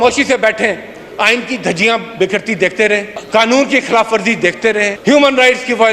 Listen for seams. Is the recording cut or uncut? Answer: uncut